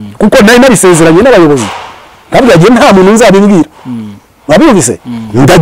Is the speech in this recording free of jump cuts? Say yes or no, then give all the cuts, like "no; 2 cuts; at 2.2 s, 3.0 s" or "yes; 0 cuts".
yes; 0 cuts